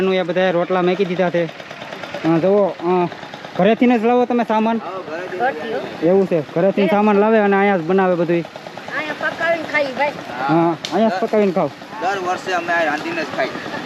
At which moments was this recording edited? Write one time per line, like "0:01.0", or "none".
none